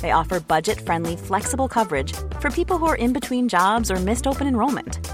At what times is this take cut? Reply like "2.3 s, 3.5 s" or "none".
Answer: none